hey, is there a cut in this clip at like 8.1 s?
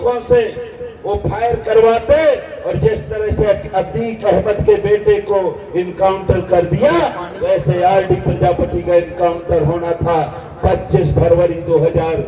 no; 0 cuts

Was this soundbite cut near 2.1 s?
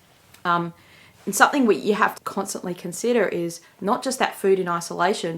yes; 1 cut; at 2.1 s

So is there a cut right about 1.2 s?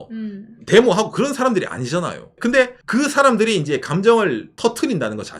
no; 2 cuts; at 2.5 s, 4.6 s

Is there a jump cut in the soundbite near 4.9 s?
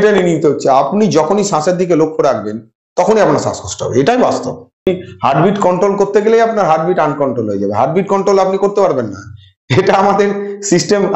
yes; 1 cut; at 4.9 s

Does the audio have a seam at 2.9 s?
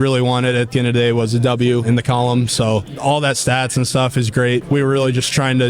yes; 3 cuts; at 1.8 s, 2.9 s, 4.6 s

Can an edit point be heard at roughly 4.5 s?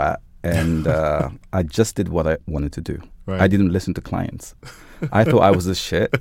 no; 1 cut; at 2.5 s

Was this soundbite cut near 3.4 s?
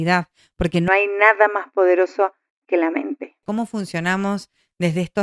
yes; 1 cut; at 3.4 s

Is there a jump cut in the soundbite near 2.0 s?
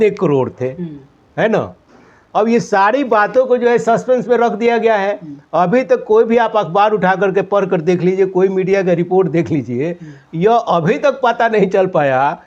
no; 0 cuts

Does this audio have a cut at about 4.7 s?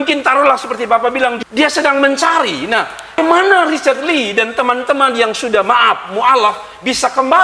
no; 2 cuts; at 1.4 s, 3.1 s

